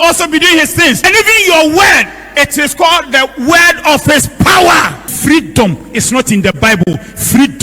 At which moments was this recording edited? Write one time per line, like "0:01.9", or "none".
0:01.0
0:05.1